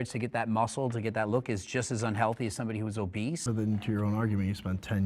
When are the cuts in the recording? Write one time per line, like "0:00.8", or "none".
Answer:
0:03.4